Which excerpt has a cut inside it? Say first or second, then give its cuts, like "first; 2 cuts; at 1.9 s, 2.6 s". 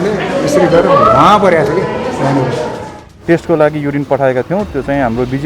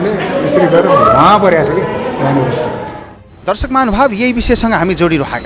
first; 1 cut; at 3.1 s